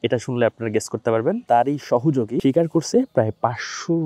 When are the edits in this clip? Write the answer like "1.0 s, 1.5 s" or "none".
1.4 s, 2.4 s